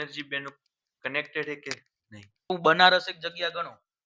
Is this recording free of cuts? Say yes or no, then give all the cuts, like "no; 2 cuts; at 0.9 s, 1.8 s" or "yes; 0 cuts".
no; 1 cut; at 2.5 s